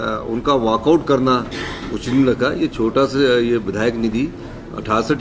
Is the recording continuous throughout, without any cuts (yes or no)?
yes